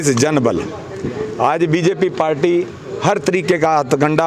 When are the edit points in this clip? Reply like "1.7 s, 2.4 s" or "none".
none